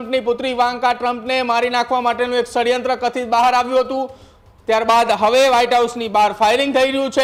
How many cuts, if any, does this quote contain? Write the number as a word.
zero